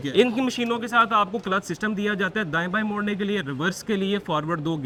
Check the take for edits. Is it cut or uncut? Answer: uncut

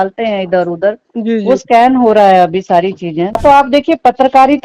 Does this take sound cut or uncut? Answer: cut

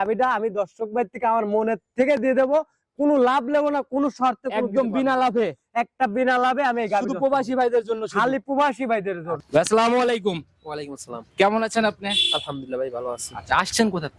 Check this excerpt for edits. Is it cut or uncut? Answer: cut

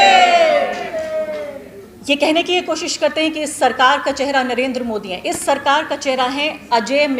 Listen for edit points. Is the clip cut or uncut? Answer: uncut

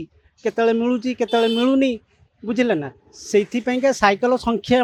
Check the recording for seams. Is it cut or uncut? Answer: uncut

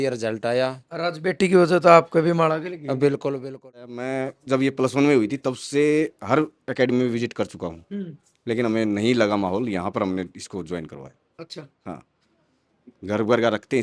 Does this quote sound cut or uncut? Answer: cut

